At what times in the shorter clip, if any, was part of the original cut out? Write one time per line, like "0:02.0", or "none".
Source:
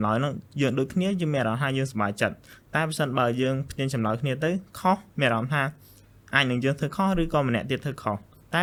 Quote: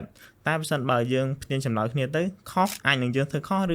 0:02.8